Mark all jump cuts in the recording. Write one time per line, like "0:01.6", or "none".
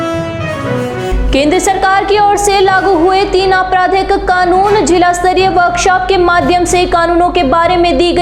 0:01.1